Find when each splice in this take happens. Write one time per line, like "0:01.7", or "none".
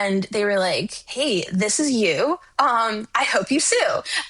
none